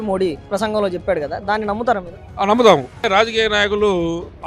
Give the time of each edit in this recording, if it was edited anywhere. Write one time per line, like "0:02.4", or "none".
0:02.2
0:03.0